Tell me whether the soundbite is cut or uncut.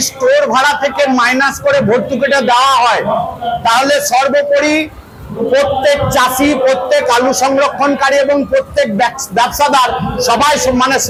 uncut